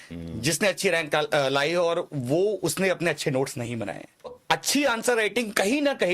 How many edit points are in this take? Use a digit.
1